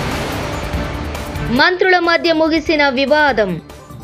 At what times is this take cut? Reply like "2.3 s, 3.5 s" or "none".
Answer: 1.3 s